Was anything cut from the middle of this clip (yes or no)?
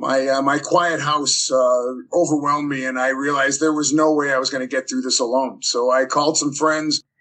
no